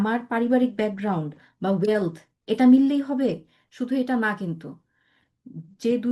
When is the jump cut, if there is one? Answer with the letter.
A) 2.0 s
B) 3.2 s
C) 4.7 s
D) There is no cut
D